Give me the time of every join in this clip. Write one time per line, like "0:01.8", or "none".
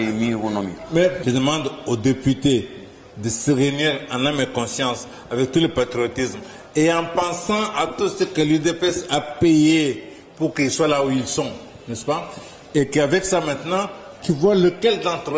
0:01.2